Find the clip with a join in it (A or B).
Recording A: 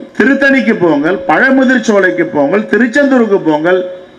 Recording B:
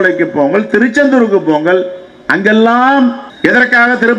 B